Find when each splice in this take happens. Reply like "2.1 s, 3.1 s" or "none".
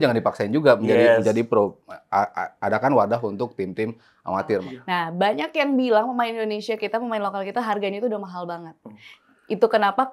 4.7 s